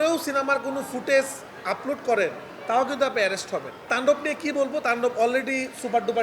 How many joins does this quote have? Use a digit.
1